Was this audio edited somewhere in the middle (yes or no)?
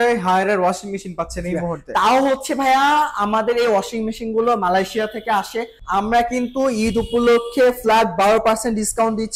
yes